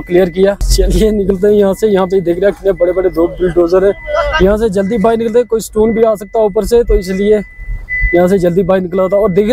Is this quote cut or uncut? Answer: uncut